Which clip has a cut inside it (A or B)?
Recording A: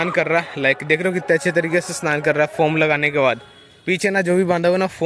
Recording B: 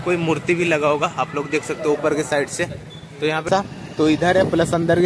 B